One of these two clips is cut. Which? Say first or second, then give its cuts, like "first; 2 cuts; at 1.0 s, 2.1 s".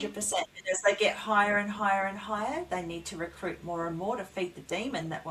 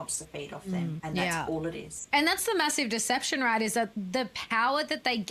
second; 3 cuts; at 1.0 s, 2.0 s, 3.9 s